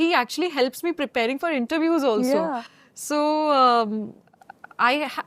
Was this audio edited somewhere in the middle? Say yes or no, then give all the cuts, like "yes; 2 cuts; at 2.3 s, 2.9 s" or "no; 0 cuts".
no; 0 cuts